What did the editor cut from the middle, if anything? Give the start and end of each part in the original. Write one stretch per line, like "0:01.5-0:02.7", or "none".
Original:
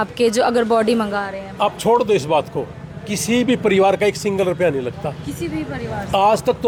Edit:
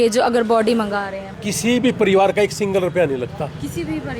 0:01.4-0:02.8